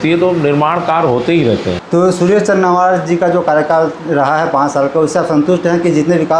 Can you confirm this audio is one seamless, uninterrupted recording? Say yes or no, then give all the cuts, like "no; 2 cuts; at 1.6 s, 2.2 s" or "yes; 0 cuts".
no; 1 cut; at 1.8 s